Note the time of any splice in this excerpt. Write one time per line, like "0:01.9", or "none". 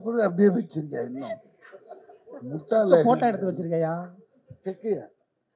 none